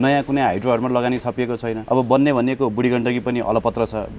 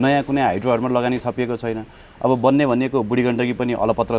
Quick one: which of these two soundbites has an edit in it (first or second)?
first